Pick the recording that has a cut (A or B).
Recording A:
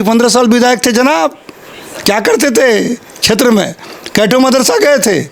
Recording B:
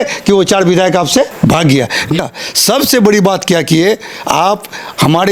B